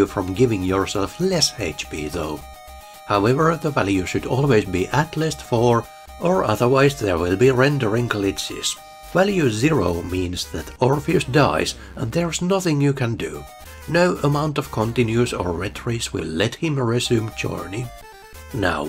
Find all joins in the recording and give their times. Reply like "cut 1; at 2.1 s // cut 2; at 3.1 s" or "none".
none

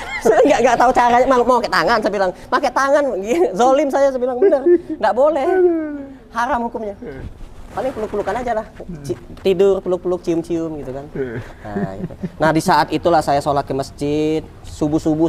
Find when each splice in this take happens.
none

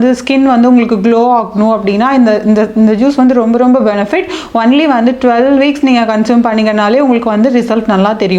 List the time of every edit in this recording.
none

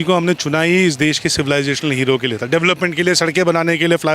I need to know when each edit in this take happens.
none

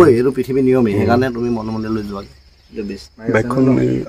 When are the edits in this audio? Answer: cut 1; at 3.0 s

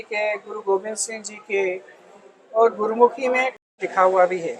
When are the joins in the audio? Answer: none

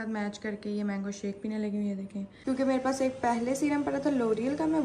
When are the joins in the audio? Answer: cut 1; at 2.3 s

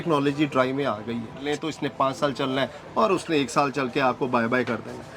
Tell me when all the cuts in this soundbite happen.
cut 1; at 1.5 s

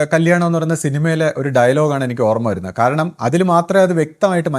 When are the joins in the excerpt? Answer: none

